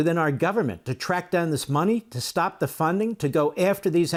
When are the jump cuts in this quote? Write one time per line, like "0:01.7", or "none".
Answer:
none